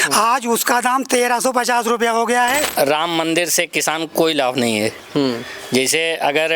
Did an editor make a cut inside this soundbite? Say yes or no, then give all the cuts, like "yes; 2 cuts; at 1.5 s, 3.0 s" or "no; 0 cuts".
yes; 1 cut; at 2.7 s